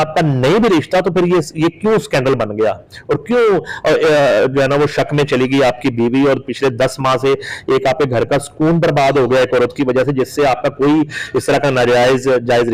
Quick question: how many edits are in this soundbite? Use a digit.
0